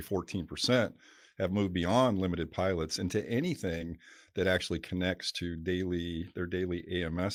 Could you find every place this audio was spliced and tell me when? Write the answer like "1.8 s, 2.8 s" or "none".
none